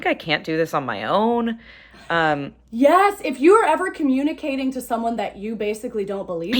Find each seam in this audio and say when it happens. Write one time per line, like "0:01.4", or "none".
none